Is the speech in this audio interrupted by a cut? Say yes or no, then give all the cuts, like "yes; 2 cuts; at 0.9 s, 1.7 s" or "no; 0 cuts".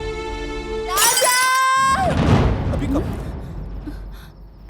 yes; 1 cut; at 1.0 s